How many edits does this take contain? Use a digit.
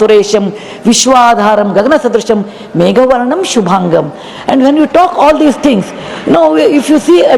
0